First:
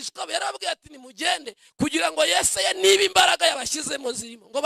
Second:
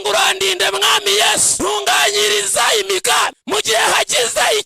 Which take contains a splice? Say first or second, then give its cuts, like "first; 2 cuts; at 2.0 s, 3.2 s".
second; 2 cuts; at 1.5 s, 3.4 s